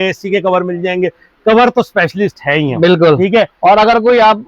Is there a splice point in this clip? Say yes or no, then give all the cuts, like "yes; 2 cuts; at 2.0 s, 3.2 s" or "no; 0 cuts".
no; 0 cuts